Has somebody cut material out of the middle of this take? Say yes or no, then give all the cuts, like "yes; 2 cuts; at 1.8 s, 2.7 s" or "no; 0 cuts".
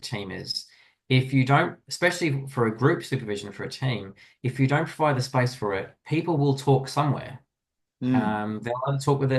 no; 0 cuts